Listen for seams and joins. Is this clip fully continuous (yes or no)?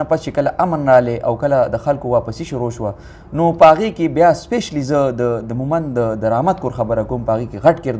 yes